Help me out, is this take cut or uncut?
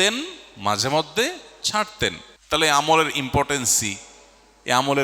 cut